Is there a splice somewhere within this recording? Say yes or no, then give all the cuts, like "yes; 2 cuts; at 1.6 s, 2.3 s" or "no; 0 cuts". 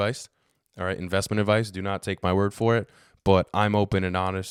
no; 0 cuts